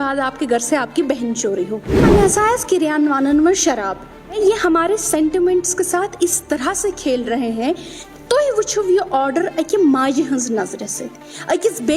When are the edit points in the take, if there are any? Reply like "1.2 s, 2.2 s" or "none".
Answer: 2.0 s, 4.4 s, 7.9 s